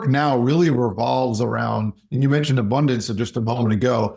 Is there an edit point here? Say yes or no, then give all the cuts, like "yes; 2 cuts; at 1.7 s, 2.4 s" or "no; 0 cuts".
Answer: no; 0 cuts